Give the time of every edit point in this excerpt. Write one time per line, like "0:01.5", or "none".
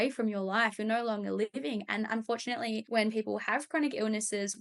0:02.8